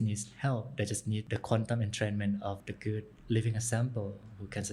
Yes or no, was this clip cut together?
yes